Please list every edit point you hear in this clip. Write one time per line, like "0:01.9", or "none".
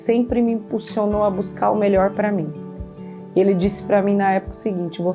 none